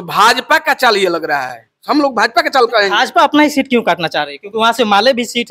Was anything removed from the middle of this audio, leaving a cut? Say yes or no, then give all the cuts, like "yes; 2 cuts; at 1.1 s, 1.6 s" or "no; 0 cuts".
no; 0 cuts